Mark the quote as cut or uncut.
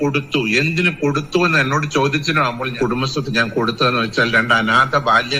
cut